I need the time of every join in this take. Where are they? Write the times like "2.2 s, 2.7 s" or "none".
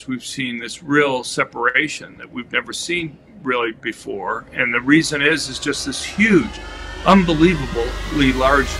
none